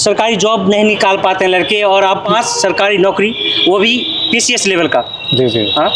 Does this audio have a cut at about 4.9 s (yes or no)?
no